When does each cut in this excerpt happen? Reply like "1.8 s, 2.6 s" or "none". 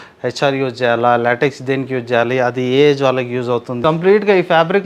3.8 s